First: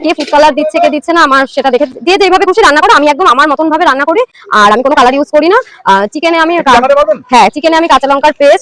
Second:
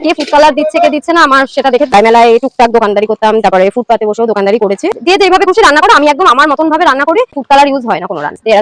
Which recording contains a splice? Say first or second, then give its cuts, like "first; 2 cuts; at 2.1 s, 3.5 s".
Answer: second; 3 cuts; at 1.9 s, 4.9 s, 7.4 s